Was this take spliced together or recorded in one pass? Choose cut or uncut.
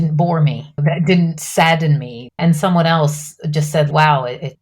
cut